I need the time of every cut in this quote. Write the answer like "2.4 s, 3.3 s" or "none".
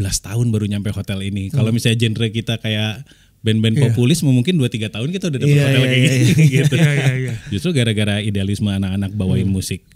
none